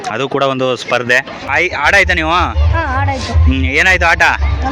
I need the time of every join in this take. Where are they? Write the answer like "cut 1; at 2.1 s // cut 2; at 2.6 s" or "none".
cut 1; at 1.5 s